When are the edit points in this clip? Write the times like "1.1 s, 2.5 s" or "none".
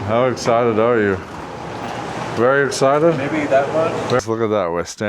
4.2 s